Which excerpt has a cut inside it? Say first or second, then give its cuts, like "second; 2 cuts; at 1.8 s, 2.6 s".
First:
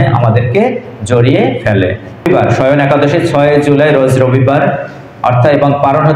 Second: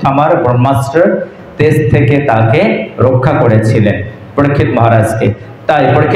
first; 1 cut; at 2.3 s